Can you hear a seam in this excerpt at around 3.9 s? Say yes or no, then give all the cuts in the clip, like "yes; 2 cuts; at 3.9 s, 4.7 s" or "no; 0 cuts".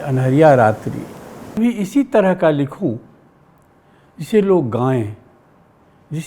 no; 1 cut; at 1.6 s